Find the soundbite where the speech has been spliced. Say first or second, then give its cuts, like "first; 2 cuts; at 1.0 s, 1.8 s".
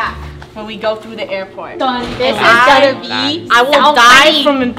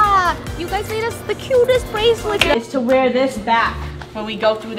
second; 1 cut; at 2.5 s